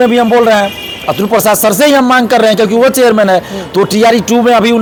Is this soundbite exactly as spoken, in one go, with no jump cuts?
yes; 0 cuts

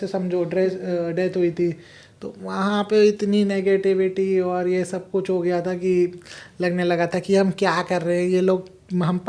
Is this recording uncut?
yes; 0 cuts

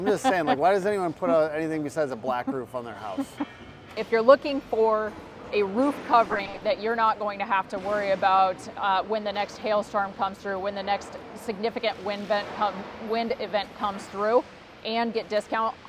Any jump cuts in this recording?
yes; 1 cut; at 3.9 s

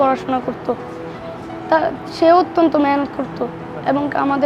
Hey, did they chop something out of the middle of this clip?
no; 0 cuts

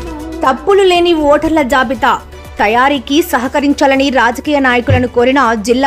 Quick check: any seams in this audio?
no; 0 cuts

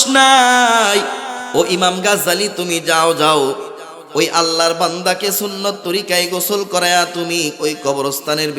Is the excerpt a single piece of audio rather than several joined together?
no; 1 cut; at 1.3 s

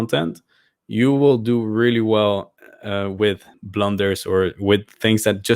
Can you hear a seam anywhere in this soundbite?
yes; 1 cut; at 3.5 s

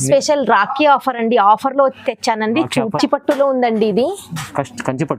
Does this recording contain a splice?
yes; 1 cut; at 3.0 s

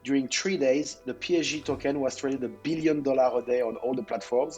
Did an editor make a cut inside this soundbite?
no; 0 cuts

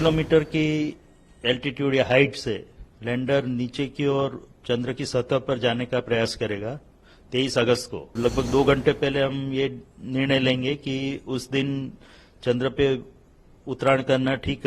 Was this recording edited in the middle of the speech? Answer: yes; 1 cut; at 8.2 s

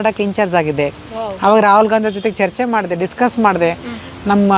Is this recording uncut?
yes; 0 cuts

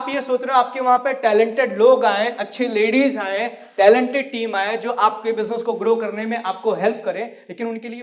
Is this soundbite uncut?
yes; 0 cuts

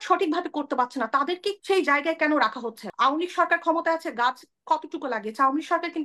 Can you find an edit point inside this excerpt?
yes; 2 cuts; at 1.6 s, 2.8 s

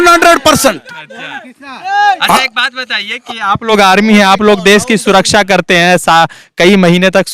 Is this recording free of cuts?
yes; 0 cuts

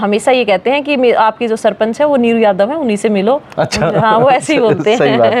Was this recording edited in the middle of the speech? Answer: no; 0 cuts

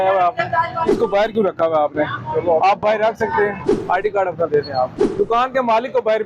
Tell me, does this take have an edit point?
yes; 3 cuts; at 0.9 s, 3.7 s, 5.0 s

